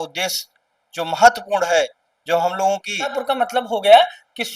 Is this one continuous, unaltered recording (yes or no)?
no